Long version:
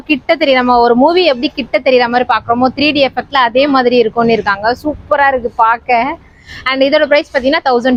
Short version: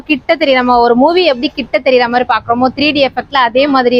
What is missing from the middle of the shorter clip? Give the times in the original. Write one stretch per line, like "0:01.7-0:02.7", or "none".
none